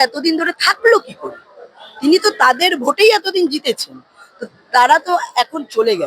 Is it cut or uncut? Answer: uncut